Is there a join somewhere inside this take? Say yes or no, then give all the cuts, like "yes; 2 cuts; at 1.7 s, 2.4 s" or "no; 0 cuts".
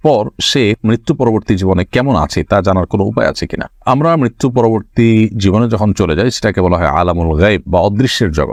no; 0 cuts